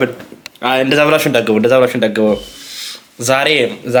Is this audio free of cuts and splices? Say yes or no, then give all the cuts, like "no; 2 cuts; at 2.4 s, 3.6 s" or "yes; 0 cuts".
yes; 0 cuts